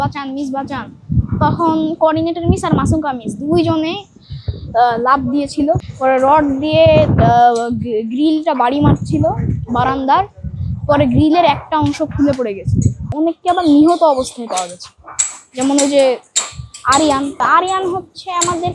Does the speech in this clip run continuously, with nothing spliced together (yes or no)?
no